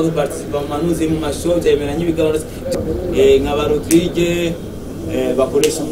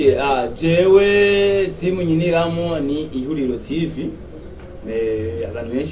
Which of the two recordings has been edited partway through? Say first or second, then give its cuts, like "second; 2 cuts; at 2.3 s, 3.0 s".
first; 1 cut; at 2.7 s